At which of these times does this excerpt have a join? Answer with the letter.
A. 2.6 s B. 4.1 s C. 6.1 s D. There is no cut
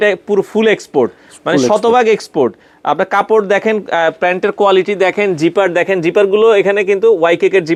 D